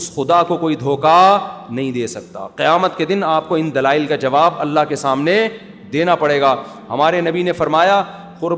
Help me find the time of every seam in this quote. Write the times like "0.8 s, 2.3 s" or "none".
none

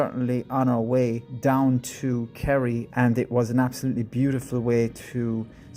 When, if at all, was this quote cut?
1.3 s, 2.9 s

